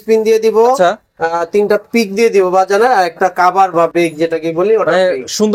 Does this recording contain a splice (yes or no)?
no